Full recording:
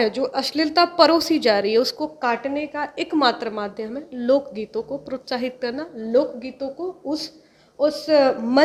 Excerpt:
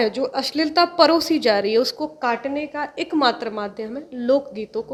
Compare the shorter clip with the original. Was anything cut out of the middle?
no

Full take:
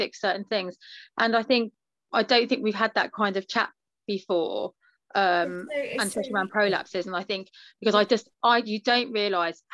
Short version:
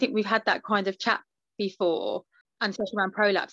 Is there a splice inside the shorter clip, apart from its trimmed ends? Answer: yes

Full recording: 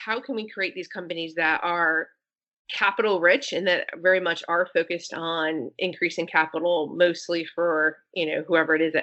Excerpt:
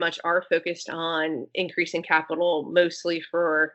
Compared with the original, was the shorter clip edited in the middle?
no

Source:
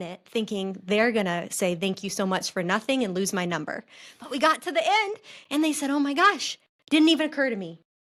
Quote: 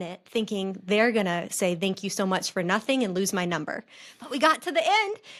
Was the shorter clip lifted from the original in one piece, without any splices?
yes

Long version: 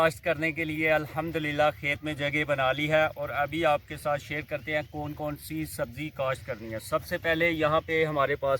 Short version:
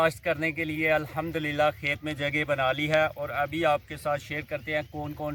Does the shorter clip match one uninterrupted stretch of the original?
yes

